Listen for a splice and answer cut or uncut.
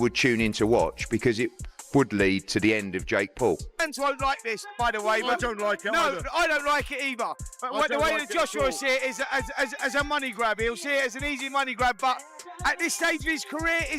cut